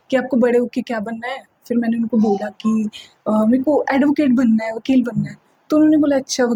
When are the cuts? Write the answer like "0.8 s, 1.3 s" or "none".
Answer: none